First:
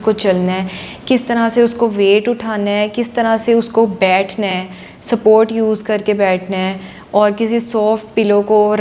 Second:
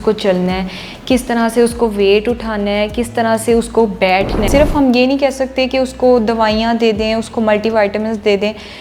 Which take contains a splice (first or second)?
second